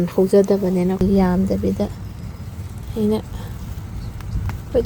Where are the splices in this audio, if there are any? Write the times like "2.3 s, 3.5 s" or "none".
1.0 s